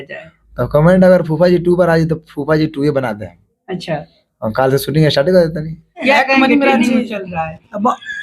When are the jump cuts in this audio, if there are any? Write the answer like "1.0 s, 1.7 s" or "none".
5.9 s